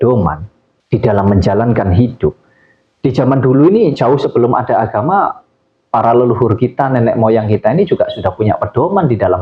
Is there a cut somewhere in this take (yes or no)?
no